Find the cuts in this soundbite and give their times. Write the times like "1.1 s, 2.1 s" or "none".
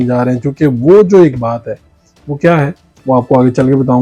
none